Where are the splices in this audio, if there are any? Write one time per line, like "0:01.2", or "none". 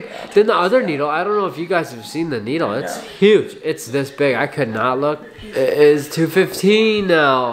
0:05.3